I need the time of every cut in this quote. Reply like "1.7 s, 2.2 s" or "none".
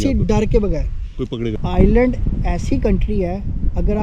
1.6 s